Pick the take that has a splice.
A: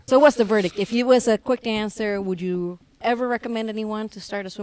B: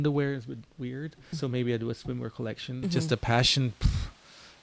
B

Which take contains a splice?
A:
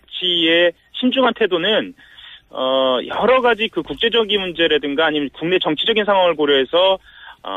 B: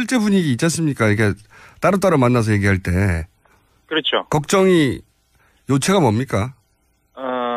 A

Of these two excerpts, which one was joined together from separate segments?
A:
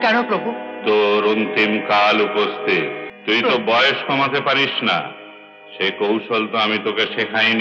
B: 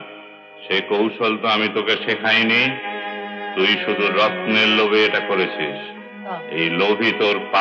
A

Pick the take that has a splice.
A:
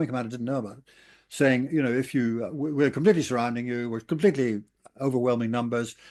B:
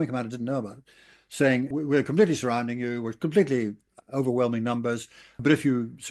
B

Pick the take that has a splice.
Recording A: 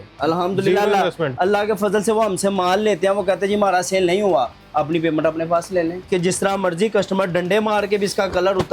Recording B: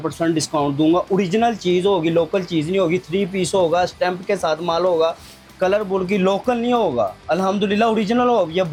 A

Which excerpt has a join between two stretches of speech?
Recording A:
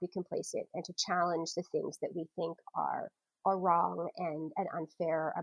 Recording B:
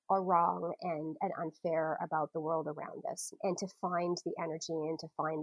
B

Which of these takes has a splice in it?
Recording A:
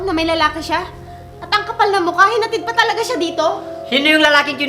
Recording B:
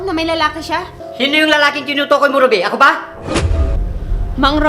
B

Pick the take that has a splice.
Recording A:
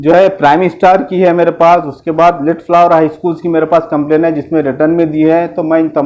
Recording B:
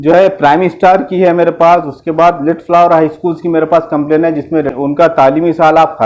B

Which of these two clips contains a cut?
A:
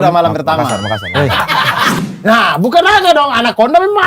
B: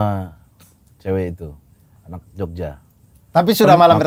A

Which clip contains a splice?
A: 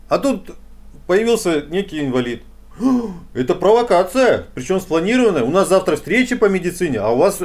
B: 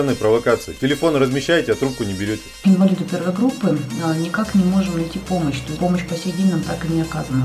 B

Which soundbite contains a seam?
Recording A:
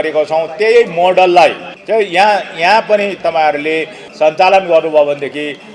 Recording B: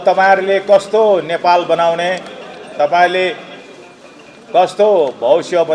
A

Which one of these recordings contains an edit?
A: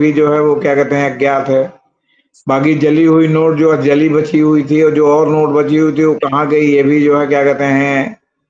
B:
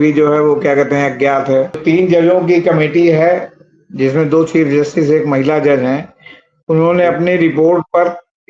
B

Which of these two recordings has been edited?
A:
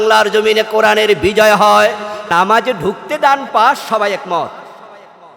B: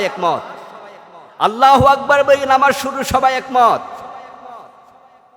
A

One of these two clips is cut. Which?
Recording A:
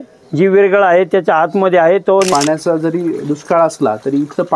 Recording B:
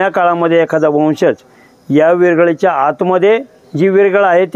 A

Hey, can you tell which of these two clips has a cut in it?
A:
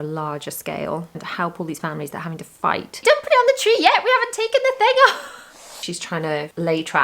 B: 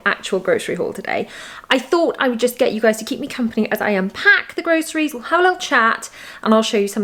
A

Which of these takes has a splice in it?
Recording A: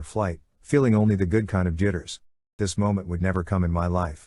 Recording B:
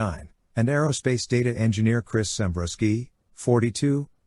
A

